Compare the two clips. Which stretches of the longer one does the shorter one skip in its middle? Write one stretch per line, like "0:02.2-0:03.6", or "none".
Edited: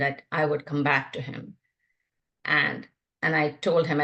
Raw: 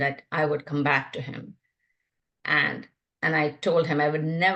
none